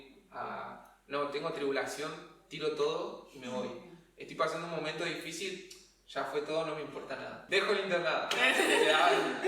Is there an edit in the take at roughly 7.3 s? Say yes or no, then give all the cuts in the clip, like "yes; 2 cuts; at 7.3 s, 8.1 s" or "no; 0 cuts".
yes; 1 cut; at 7.3 s